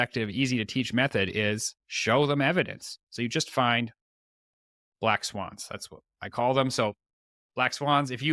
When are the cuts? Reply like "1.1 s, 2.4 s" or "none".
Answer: none